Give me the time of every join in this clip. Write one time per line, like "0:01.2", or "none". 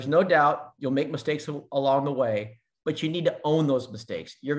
none